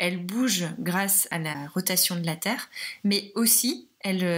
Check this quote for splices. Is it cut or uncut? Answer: cut